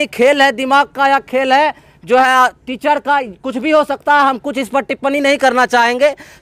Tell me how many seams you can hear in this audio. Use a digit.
0